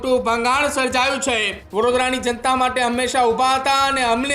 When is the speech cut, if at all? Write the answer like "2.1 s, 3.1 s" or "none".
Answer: 1.6 s